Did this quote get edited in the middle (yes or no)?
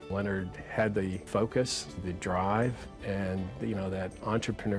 yes